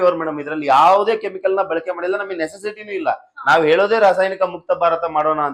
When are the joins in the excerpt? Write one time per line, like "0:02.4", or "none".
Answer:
none